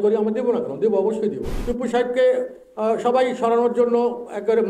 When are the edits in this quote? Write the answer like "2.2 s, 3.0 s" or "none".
1.5 s